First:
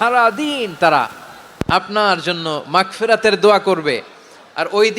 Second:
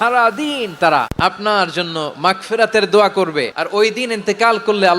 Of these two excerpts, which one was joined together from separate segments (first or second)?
second